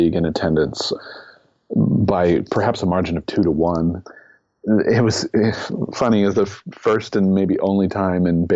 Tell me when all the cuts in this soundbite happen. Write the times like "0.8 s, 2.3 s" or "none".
0.9 s, 4.1 s